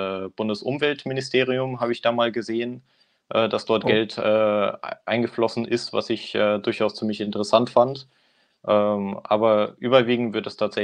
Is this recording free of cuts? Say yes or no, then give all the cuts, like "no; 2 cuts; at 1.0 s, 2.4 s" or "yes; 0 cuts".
yes; 0 cuts